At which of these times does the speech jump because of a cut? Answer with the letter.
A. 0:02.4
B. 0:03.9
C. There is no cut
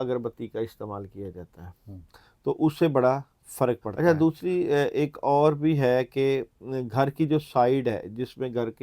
B